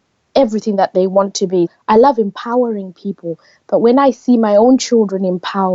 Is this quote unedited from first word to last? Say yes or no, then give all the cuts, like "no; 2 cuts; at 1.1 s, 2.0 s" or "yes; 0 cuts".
no; 1 cut; at 1.7 s